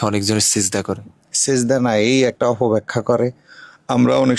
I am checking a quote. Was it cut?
no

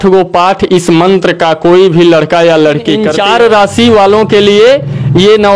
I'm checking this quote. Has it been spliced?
yes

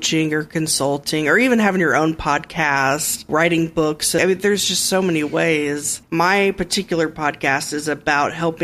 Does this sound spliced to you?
yes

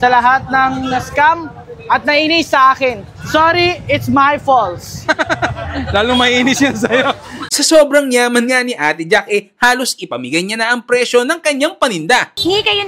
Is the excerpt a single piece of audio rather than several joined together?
no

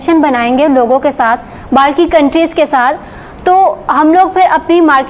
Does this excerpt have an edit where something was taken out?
no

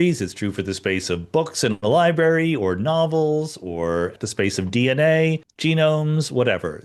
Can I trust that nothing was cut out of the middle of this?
no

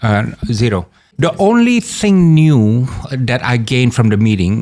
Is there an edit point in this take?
yes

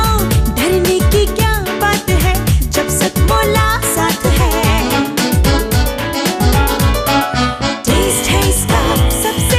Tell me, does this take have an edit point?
no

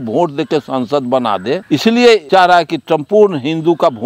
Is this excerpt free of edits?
no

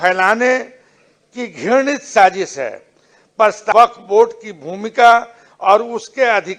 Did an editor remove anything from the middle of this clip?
yes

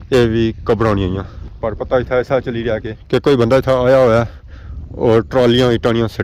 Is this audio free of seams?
yes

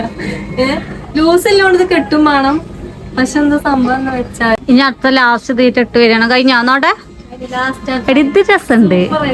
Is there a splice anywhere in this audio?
yes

